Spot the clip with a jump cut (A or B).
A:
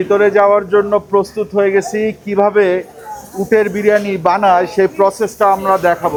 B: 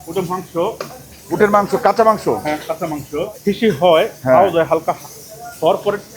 B